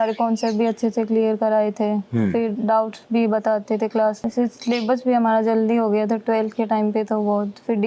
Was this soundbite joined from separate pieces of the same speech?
yes; 1 cut; at 4.2 s

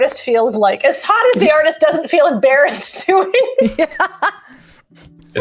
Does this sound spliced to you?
no; 0 cuts

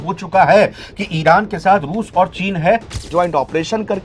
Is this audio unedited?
no; 1 cut; at 3.1 s

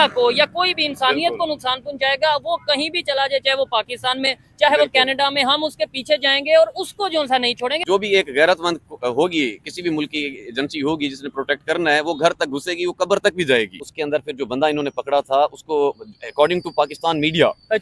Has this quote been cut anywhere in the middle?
yes; 2 cuts; at 7.8 s, 13.9 s

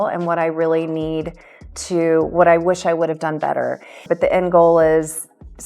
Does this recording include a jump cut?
yes; 1 cut; at 4.0 s

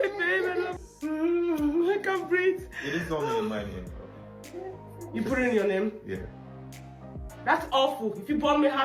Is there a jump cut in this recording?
no; 0 cuts

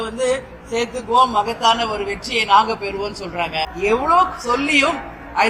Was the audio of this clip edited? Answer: yes; 1 cut; at 3.7 s

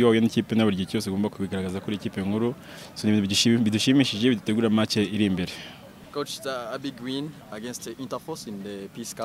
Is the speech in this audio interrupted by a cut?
yes; 1 cut; at 6.0 s

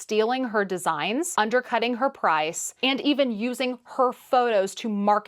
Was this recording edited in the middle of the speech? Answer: yes; 1 cut; at 1.3 s

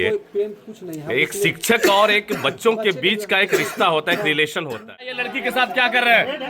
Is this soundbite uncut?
no; 1 cut; at 5.2 s

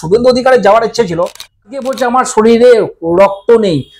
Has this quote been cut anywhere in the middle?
yes; 1 cut; at 1.6 s

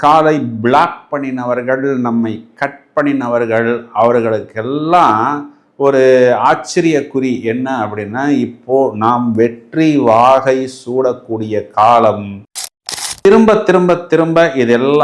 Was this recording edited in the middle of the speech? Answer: yes; 1 cut; at 13.1 s

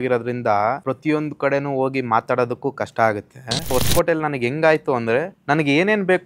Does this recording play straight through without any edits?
no; 3 cuts; at 0.8 s, 3.7 s, 5.3 s

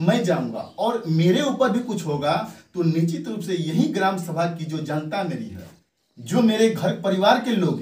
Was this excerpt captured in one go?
yes; 0 cuts

